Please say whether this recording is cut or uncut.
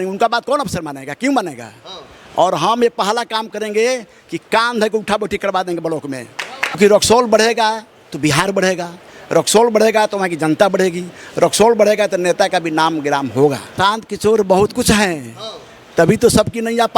cut